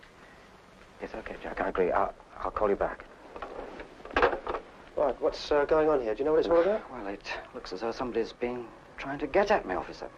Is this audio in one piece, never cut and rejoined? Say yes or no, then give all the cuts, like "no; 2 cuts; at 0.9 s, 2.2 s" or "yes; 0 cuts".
yes; 0 cuts